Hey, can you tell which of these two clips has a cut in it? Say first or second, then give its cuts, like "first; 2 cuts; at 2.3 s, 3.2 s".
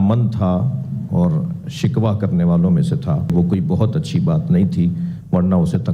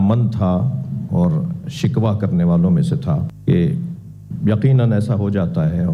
first; 1 cut; at 3.3 s